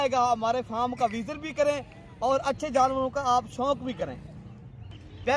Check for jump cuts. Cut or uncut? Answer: uncut